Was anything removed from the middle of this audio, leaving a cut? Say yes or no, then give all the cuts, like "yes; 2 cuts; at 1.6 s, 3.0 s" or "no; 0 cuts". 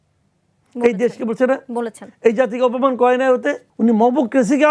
yes; 1 cut; at 3.7 s